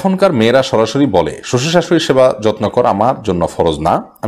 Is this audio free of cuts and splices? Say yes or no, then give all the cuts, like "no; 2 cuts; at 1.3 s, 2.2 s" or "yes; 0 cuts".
yes; 0 cuts